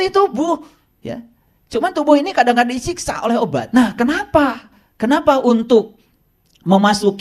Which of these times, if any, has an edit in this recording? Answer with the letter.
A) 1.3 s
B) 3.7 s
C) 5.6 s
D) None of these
B